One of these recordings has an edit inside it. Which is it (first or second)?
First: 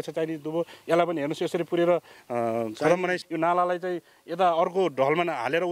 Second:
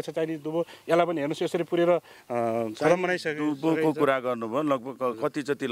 first